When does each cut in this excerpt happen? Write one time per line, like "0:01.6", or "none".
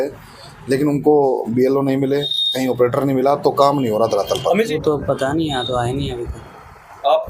0:04.7